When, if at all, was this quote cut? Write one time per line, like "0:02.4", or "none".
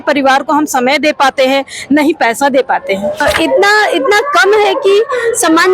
0:03.2